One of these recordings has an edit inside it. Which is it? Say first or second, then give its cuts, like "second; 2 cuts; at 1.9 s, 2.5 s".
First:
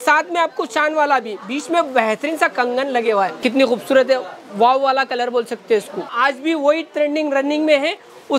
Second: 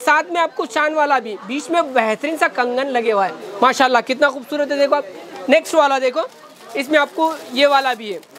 first; 2 cuts; at 3.4 s, 6.1 s